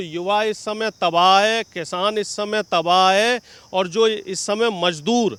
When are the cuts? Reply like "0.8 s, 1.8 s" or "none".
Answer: none